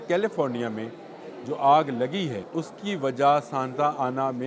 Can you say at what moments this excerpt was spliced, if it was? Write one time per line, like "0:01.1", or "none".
0:02.4